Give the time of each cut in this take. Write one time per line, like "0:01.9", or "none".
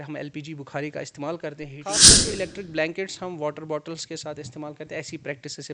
0:02.0